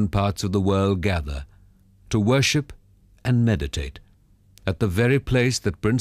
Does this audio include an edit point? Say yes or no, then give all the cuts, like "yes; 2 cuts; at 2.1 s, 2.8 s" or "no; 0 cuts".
no; 0 cuts